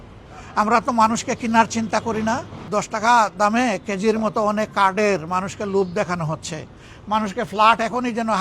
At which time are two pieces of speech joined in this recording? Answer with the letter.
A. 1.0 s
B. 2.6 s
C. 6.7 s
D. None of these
B